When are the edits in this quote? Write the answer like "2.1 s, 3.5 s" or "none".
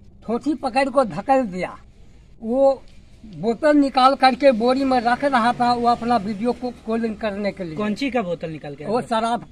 none